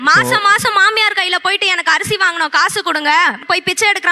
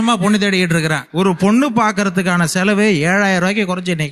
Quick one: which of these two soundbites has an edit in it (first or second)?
second